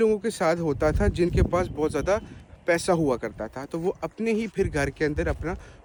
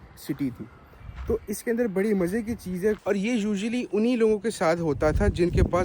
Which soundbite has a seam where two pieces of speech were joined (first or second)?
second